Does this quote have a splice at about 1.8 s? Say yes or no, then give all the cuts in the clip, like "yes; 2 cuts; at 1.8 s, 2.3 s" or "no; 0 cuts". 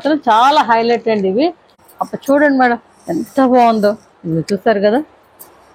yes; 1 cut; at 1.8 s